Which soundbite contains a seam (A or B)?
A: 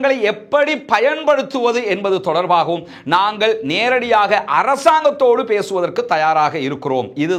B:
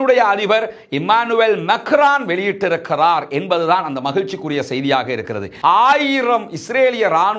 B